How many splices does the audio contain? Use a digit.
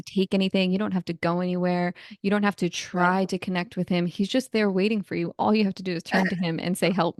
0